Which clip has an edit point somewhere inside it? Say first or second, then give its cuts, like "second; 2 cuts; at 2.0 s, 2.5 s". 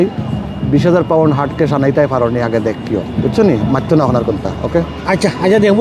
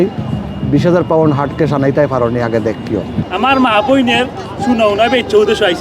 second; 1 cut; at 3.1 s